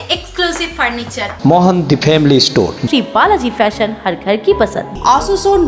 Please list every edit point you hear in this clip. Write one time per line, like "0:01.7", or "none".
none

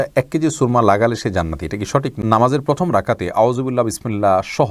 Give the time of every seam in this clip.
0:02.1

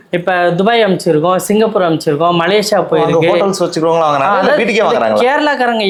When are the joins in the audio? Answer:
none

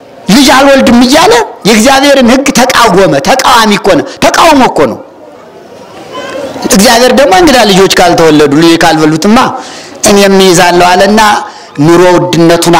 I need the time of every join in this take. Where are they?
none

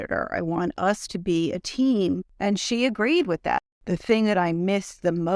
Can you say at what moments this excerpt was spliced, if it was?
0:02.3
0:03.7

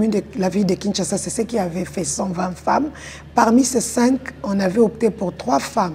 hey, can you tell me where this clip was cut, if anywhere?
none

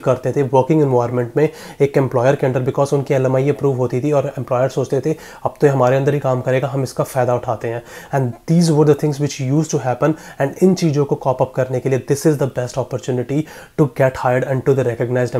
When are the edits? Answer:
none

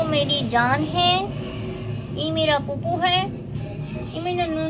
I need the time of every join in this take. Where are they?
none

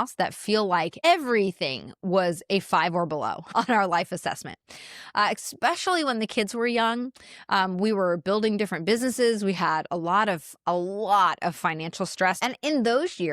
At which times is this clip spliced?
0:01.0
0:03.5
0:12.4

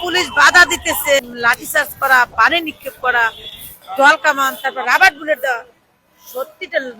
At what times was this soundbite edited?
0:01.2

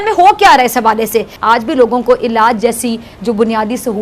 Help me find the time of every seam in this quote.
0:01.3

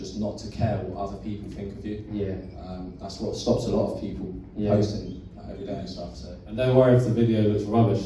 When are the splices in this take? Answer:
none

